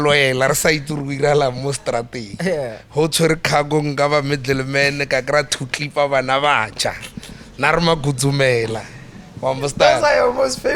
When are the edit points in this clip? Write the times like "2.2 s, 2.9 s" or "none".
none